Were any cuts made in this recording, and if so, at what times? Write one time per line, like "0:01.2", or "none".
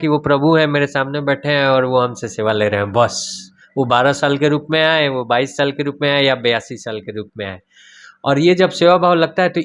none

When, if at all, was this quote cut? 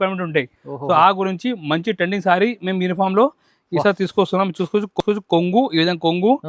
none

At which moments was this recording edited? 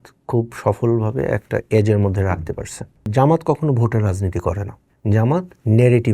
0:03.1

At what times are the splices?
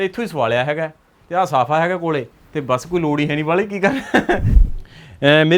0:04.6

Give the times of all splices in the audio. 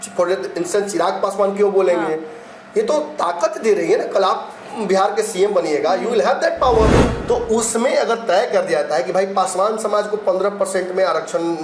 0:07.1

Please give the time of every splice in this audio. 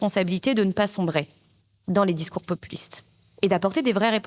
none

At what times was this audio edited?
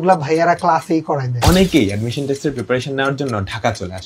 0:01.3

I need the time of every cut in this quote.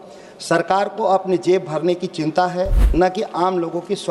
0:02.8

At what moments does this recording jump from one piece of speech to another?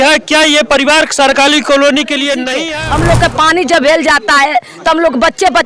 0:02.6

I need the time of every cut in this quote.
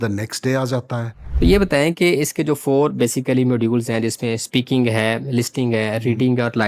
0:01.2

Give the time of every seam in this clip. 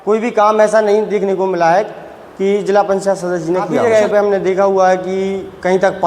0:03.8

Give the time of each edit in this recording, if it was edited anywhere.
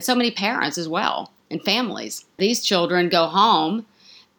0:02.3

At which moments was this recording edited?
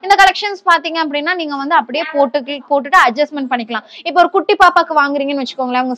none

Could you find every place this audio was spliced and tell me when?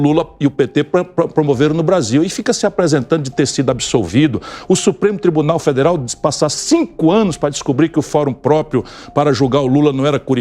none

